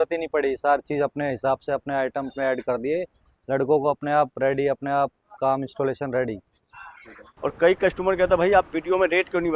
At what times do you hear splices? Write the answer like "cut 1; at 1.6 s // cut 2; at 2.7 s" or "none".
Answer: cut 1; at 7.2 s